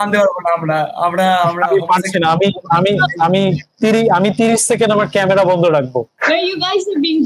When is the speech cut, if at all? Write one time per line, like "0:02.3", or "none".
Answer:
0:06.1